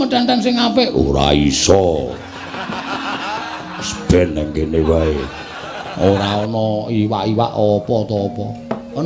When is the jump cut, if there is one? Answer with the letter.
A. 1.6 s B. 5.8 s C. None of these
B